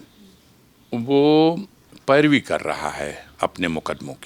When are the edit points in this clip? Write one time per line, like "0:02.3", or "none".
none